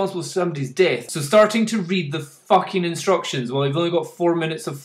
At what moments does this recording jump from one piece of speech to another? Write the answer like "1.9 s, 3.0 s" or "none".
1.1 s